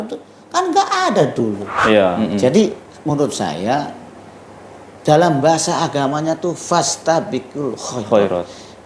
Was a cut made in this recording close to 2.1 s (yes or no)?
yes